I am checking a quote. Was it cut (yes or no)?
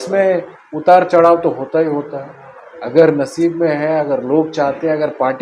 no